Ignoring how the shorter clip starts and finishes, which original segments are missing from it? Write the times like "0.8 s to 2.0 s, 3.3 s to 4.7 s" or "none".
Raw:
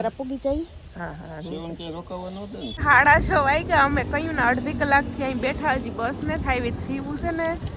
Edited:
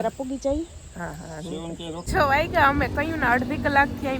2.1 s to 3.3 s

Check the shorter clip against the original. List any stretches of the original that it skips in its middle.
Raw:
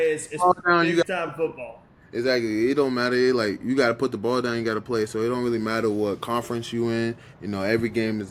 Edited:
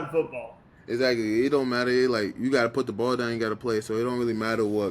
none

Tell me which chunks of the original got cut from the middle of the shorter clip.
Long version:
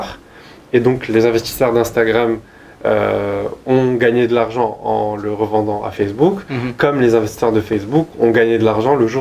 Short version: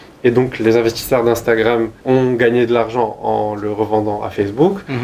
2.5 s to 3.6 s

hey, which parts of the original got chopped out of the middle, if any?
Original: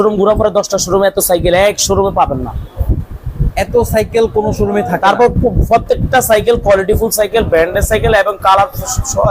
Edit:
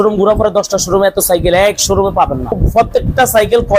2.6 s to 5.5 s

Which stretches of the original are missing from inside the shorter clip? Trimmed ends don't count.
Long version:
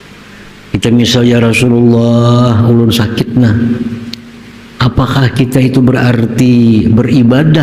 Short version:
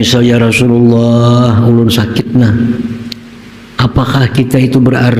none

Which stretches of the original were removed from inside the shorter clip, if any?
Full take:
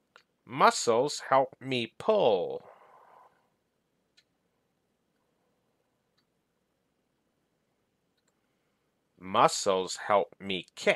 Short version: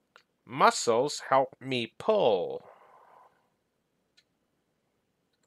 4.4 s to 7.2 s

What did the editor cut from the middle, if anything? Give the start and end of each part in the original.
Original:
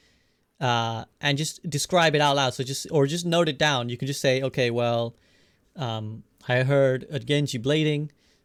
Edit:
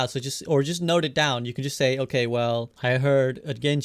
5.2 s to 6.4 s

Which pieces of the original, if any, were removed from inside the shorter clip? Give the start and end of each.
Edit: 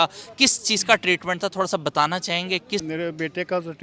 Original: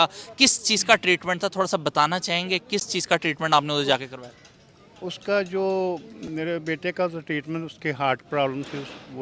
2.9 s to 6.3 s

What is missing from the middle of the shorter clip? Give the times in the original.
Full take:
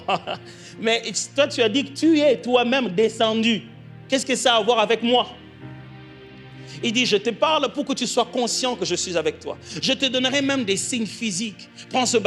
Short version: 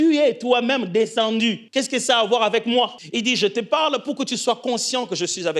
3.7 s to 4.0 s, 5.4 s to 6.7 s

